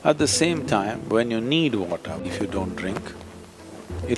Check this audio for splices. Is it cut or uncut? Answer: cut